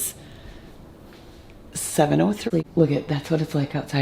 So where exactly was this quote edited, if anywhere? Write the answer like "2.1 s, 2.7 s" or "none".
2.4 s